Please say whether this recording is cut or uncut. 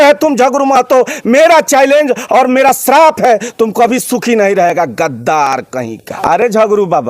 cut